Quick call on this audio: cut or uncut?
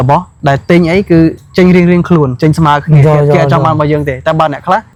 uncut